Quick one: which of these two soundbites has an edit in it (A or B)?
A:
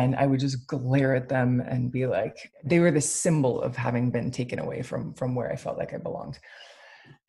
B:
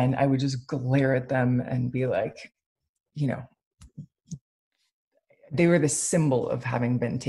A